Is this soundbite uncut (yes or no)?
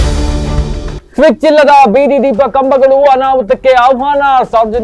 no